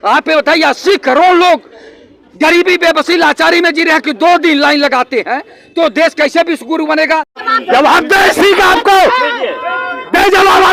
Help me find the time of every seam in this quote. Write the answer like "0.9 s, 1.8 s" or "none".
7.3 s